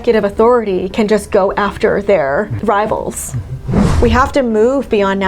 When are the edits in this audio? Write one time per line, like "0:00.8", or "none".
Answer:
0:02.5
0:03.5